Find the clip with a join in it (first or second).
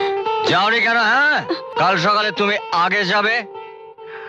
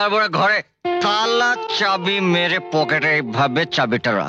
first